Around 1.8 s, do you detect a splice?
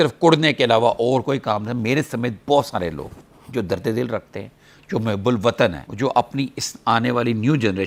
no; 0 cuts

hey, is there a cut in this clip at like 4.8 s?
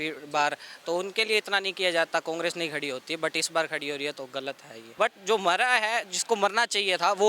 yes; 1 cut; at 4.8 s

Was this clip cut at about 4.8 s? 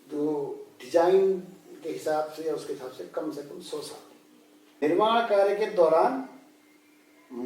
yes; 1 cut; at 4.8 s

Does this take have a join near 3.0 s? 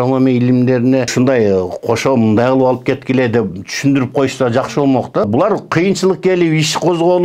no; 2 cuts; at 1.1 s, 5.2 s

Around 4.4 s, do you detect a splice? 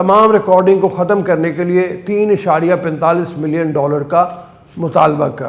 no; 0 cuts

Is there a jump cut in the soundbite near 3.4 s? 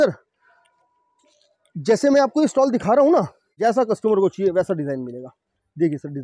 yes; 1 cut; at 3.4 s

